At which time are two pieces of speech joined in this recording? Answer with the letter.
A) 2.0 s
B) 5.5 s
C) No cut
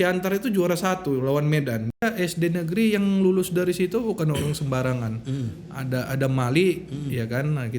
A